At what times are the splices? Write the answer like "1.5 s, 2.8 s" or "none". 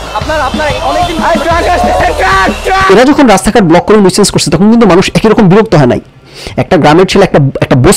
2.8 s